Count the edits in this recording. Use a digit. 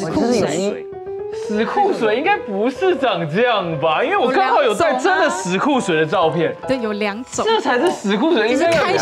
0